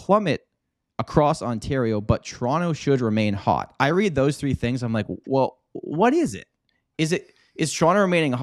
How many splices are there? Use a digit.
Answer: 0